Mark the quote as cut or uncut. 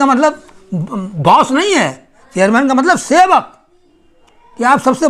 uncut